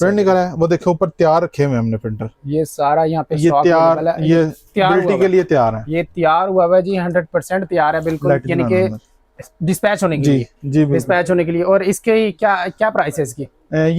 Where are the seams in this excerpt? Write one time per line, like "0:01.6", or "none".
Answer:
none